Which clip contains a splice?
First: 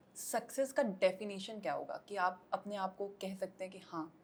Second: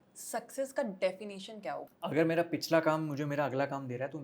second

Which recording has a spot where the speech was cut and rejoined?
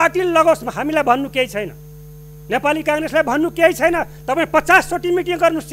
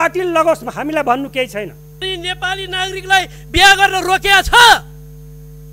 second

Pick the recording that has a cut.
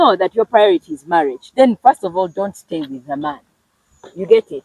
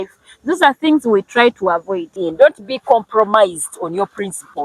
second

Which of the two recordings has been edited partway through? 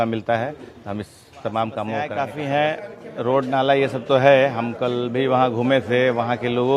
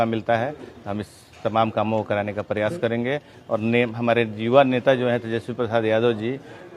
first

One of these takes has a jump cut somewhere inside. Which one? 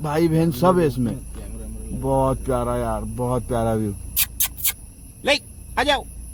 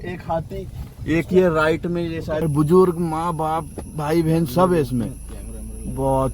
second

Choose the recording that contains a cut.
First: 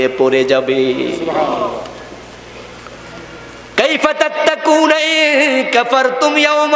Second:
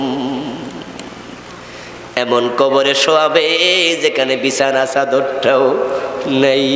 first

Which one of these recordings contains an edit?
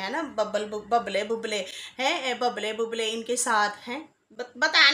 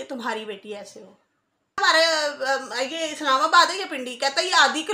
second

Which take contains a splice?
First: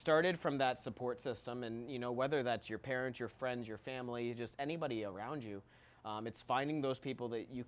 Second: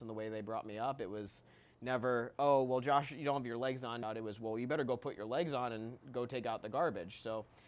second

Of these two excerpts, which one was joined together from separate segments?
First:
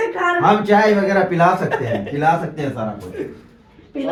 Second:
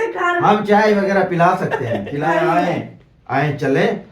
second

